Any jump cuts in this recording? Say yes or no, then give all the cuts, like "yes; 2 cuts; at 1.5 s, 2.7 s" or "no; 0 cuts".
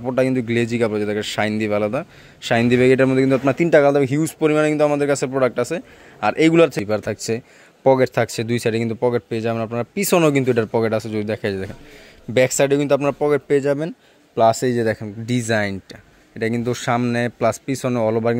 yes; 1 cut; at 6.8 s